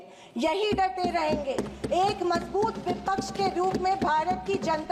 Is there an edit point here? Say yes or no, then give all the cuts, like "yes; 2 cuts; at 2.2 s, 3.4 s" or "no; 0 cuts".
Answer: no; 0 cuts